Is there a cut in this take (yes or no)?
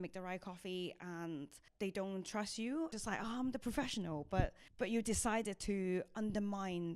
yes